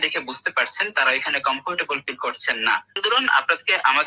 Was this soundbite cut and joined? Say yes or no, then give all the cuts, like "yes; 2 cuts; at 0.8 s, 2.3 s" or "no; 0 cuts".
yes; 1 cut; at 3.0 s